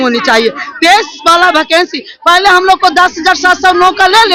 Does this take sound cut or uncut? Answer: uncut